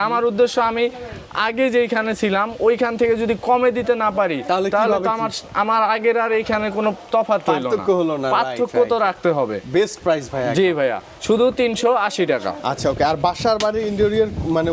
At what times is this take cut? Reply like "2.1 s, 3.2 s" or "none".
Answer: none